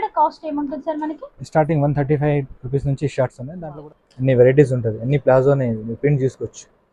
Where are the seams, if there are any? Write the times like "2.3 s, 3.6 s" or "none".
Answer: 3.5 s